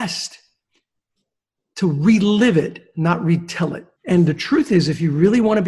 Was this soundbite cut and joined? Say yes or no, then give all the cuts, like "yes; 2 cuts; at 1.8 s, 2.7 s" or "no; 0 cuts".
yes; 1 cut; at 3.9 s